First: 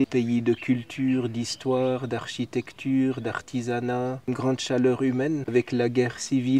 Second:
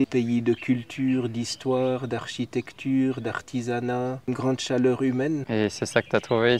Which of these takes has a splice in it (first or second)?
first